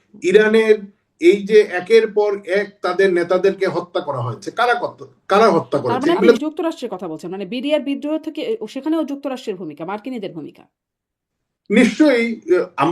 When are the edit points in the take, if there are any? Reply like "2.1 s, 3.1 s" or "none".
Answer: 6.4 s